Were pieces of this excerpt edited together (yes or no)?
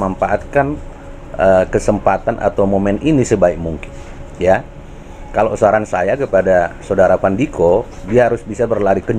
no